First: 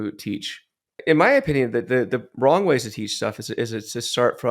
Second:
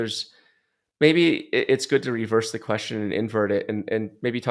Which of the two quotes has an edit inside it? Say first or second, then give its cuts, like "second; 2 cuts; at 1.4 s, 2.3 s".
first; 1 cut; at 1.0 s